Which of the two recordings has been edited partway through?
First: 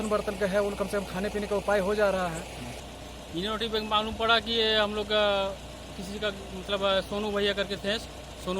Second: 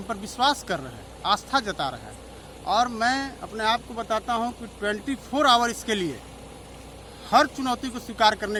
first; 1 cut; at 2.8 s

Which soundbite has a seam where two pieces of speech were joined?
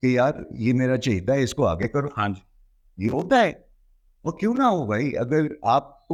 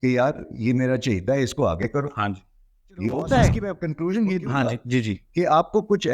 second; 1 cut; at 3.7 s

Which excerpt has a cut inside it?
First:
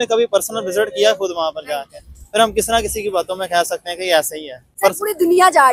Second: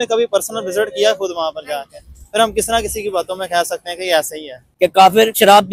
second; 1 cut; at 4.6 s

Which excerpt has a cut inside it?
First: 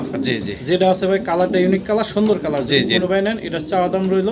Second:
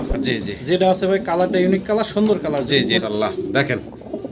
second; 1 cut; at 3.0 s

